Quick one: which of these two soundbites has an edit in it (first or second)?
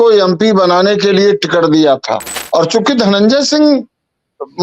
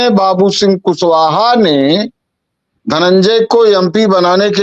first